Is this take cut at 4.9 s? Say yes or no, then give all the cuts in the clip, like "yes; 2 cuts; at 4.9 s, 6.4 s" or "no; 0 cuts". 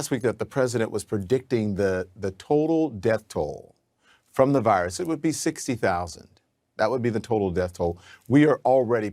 no; 1 cut; at 6.8 s